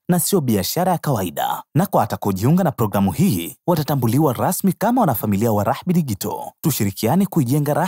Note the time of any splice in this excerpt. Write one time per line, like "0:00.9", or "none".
none